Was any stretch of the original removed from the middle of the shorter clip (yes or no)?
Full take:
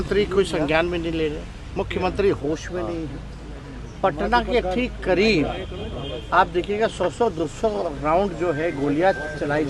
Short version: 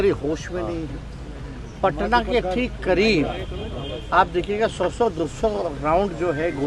no